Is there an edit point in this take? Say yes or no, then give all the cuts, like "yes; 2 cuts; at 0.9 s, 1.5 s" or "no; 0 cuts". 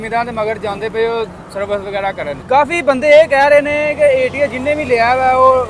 yes; 1 cut; at 2.4 s